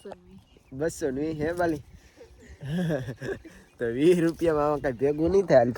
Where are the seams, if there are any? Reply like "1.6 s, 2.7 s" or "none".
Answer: none

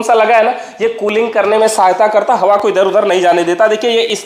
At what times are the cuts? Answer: none

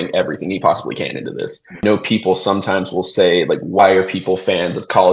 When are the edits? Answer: 1.8 s, 3.8 s

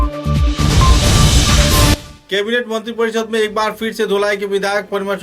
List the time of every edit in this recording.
2.1 s

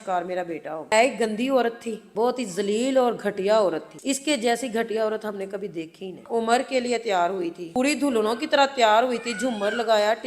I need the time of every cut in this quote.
0.9 s, 2.1 s, 6.2 s, 7.6 s

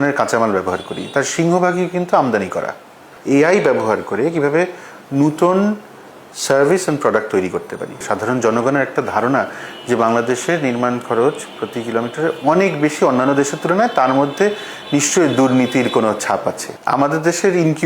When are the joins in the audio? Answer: 3.1 s, 8.0 s, 16.7 s

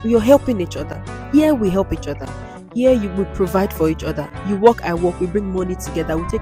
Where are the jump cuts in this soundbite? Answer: none

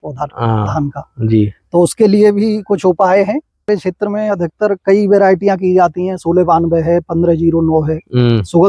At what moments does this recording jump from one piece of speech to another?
3.7 s

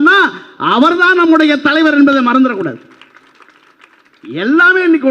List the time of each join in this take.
none

